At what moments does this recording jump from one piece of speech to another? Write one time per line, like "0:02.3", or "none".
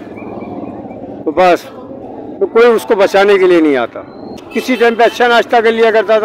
0:04.5